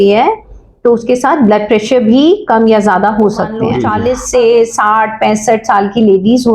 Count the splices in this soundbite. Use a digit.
1